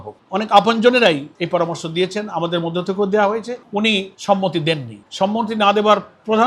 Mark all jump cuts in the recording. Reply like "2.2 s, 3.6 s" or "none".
3.7 s